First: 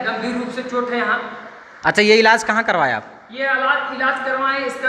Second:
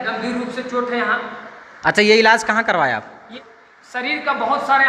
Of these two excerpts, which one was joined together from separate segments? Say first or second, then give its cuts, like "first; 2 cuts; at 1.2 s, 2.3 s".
second; 1 cut; at 3.2 s